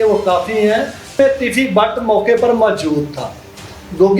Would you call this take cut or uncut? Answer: cut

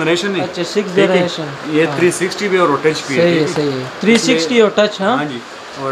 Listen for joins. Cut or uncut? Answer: uncut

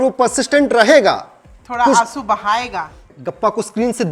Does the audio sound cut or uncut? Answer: cut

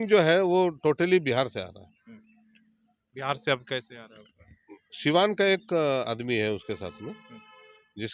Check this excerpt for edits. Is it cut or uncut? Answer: uncut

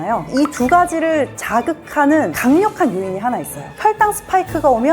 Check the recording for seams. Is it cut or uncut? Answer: cut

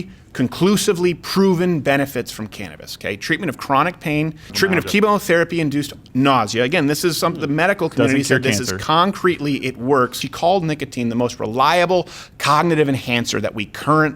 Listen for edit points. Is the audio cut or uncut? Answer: cut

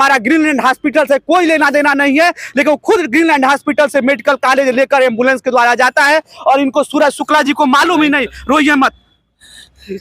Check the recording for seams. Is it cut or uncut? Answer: uncut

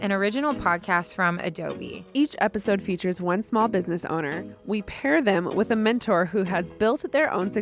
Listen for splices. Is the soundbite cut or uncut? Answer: cut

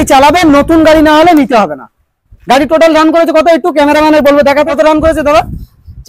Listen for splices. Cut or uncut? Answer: uncut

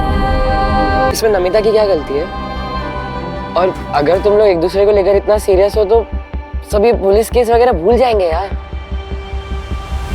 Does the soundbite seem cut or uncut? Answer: cut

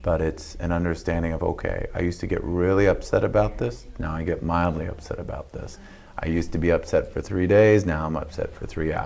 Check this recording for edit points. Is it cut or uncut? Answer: uncut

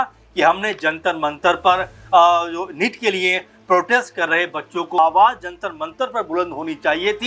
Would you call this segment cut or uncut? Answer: cut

